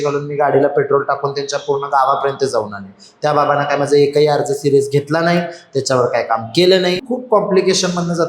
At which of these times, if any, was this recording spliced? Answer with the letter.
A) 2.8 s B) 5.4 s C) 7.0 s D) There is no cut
C